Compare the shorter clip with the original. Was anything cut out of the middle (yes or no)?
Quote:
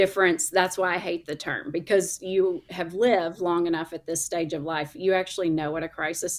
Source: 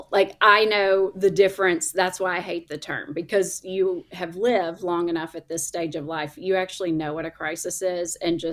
no